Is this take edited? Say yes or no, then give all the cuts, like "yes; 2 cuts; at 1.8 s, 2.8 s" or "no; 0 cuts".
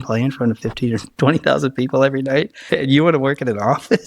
yes; 1 cut; at 2.6 s